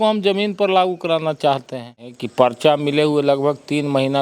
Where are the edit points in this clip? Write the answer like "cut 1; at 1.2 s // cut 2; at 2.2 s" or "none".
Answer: cut 1; at 2.1 s